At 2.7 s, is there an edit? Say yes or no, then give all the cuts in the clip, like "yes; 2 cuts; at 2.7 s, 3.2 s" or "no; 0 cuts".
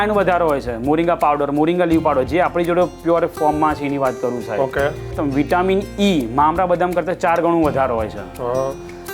no; 1 cut; at 5.1 s